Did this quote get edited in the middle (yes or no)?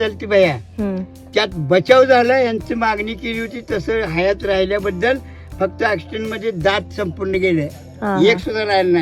no